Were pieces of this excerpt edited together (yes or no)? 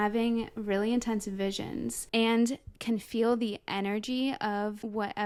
no